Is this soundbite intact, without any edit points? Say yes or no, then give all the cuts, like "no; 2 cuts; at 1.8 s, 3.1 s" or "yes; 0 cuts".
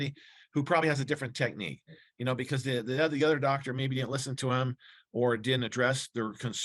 yes; 0 cuts